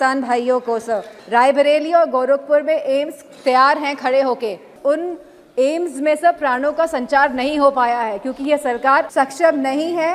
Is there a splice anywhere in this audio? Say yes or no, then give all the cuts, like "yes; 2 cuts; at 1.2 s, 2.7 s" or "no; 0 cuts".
yes; 3 cuts; at 1.1 s, 4.7 s, 9.1 s